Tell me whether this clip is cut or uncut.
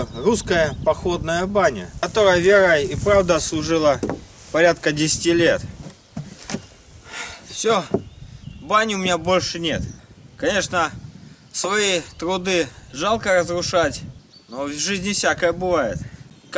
cut